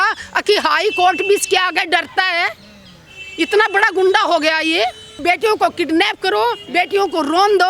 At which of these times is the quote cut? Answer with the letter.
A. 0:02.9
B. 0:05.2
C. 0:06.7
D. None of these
B